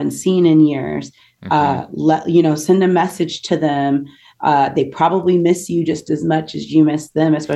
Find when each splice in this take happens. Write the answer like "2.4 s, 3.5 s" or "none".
none